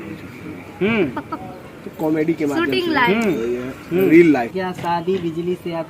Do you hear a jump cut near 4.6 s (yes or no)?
yes